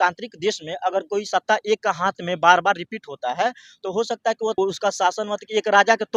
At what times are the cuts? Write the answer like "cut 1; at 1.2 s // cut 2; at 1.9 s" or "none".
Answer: cut 1; at 4.6 s